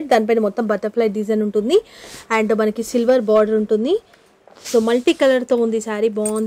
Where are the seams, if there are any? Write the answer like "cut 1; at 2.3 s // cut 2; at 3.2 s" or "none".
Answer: none